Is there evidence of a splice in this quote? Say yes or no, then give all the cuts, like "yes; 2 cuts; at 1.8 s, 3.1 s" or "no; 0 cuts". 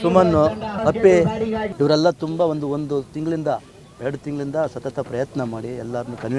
yes; 2 cuts; at 0.8 s, 1.6 s